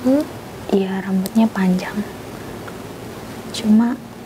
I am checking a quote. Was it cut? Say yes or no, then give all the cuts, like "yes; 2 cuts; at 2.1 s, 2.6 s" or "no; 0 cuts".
no; 0 cuts